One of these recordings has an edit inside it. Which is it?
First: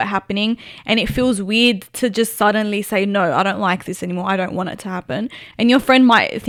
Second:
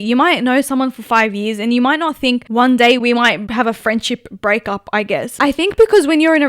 second; 3 cuts; at 2.5 s, 3.4 s, 5.3 s

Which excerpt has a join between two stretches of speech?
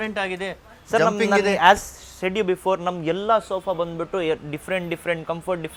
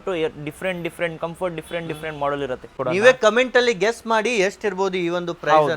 second; 1 cut; at 2.8 s

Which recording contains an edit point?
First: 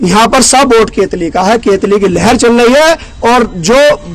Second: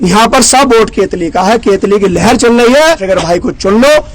second; 1 cut; at 3.0 s

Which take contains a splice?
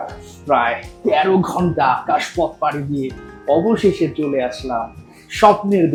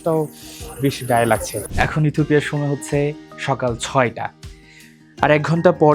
second; 1 cut; at 1.6 s

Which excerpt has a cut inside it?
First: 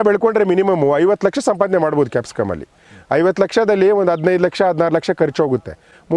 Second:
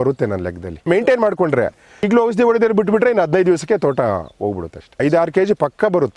second; 3 cuts; at 0.8 s, 2.1 s, 5.0 s

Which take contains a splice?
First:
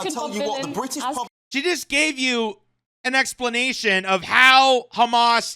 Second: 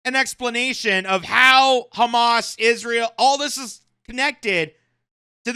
first; 1 cut; at 1.4 s

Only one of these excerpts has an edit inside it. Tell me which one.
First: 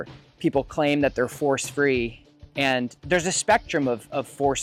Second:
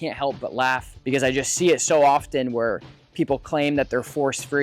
second; 1 cut; at 0.9 s

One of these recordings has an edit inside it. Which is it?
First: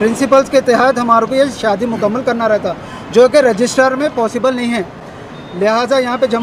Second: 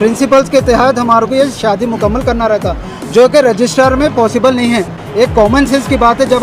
second; 1 cut; at 5.0 s

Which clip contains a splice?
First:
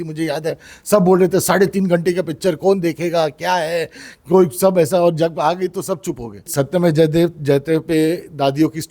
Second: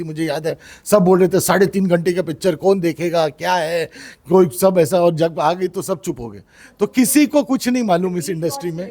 first; 1 cut; at 6.5 s

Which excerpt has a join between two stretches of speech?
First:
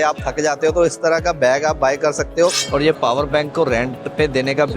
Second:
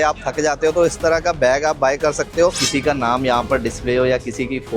second; 1 cut; at 2.6 s

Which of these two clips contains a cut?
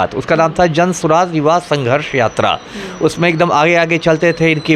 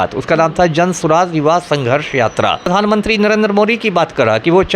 second; 1 cut; at 2.6 s

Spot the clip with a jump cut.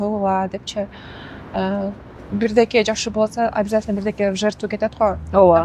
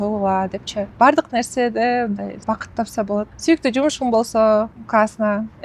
second; 4 cuts; at 0.9 s, 2.4 s, 3.3 s, 4.8 s

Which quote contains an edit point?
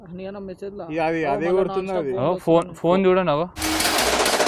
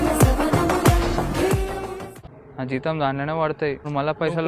second; 1 cut; at 2.1 s

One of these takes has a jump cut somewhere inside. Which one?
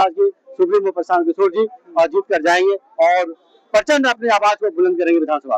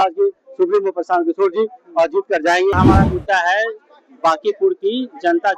second; 1 cut; at 2.8 s

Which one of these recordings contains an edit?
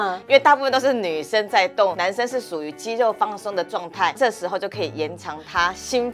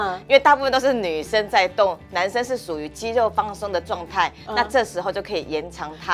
first; 2 cuts; at 2.0 s, 4.2 s

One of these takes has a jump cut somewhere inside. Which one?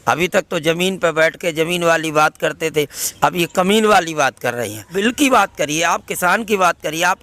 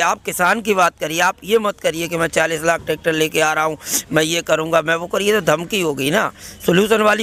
first; 1 cut; at 4.9 s

